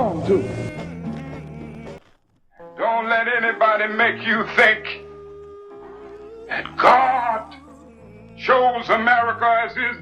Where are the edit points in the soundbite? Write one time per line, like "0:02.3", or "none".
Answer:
0:02.0